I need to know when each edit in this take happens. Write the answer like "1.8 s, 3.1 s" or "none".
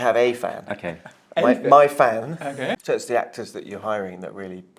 2.8 s